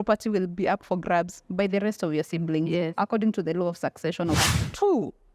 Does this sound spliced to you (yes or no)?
yes